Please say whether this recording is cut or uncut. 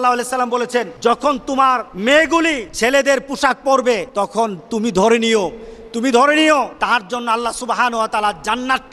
cut